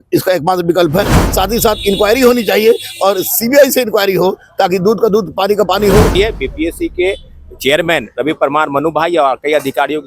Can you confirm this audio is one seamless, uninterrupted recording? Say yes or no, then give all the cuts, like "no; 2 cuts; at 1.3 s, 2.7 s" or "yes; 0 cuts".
no; 1 cut; at 6.2 s